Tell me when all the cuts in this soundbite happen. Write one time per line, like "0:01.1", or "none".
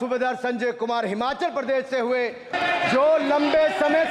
0:02.5